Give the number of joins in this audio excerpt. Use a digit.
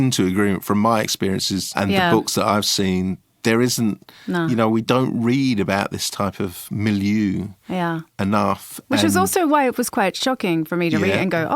1